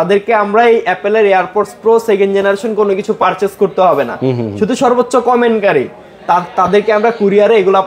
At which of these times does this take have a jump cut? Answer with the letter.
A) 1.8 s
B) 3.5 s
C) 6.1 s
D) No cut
D